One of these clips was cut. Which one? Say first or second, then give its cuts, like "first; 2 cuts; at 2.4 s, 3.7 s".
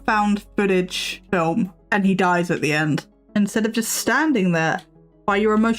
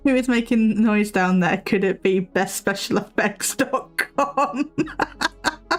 first; 2 cuts; at 1.5 s, 3.1 s